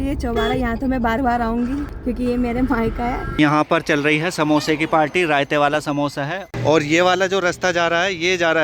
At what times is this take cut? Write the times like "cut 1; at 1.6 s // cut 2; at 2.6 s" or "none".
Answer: cut 1; at 2.0 s // cut 2; at 3.3 s // cut 3; at 6.5 s